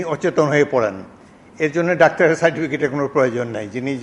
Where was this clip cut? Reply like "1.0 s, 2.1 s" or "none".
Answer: none